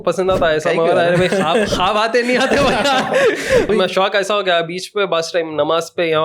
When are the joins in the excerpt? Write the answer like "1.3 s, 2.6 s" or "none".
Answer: 3.7 s